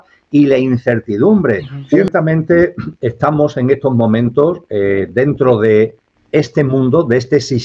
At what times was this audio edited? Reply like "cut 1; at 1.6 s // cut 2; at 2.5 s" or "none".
cut 1; at 2.1 s

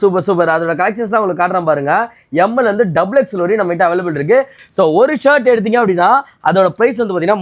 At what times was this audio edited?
none

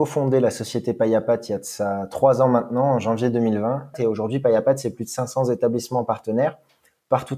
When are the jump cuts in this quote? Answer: cut 1; at 4.0 s

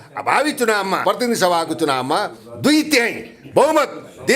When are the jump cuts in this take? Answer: cut 1; at 1.0 s

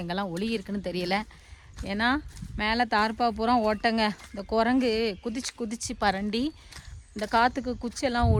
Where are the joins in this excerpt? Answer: none

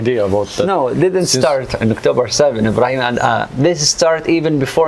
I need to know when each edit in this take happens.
none

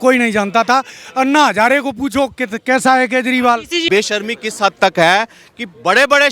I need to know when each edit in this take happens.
cut 1; at 3.9 s

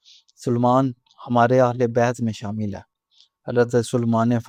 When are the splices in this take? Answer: none

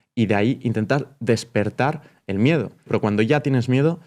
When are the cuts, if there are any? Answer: cut 1; at 2.9 s

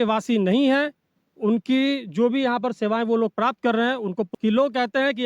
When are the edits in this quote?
cut 1; at 4.2 s

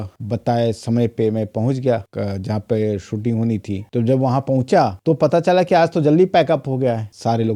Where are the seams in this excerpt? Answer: none

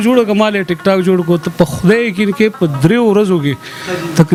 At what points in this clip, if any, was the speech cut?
none

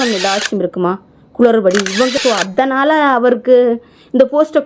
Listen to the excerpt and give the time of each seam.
cut 1; at 2.2 s

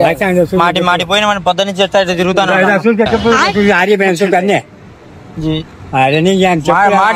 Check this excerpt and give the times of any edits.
none

